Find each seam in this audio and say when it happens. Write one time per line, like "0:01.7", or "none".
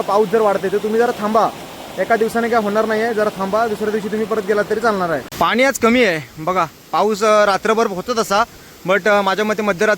0:05.3